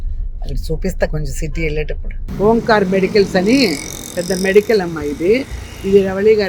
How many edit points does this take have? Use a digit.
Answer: 1